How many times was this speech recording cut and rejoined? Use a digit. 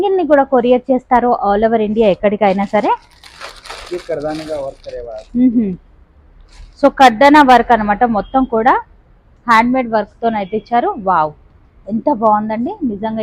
0